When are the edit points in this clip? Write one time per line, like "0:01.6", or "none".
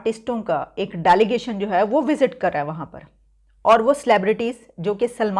none